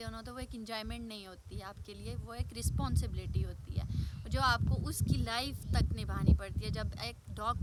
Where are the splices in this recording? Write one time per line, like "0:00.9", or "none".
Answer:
none

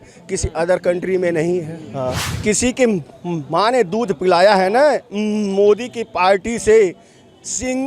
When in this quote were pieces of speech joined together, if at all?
0:02.1

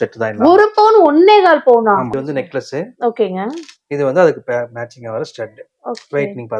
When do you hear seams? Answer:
0:02.2

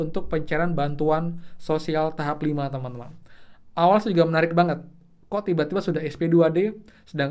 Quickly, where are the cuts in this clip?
none

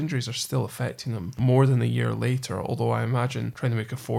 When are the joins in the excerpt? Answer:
0:01.4

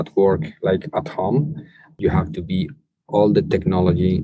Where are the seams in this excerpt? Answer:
0:01.9

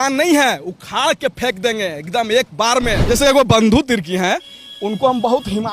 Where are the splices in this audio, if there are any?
0:03.0

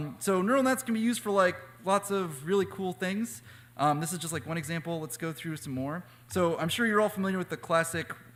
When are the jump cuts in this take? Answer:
none

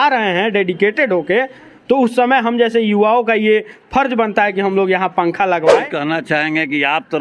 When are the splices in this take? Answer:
0:05.8

